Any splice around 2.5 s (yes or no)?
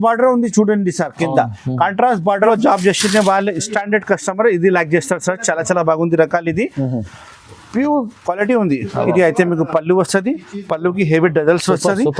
yes